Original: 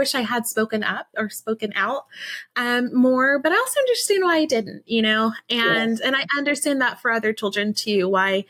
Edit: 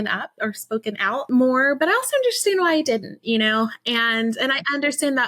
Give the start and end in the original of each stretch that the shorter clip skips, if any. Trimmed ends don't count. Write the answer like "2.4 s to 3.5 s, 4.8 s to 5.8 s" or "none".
2.0 s to 2.9 s